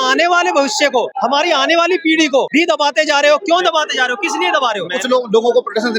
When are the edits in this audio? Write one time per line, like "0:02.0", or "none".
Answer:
0:01.1
0:02.5
0:04.9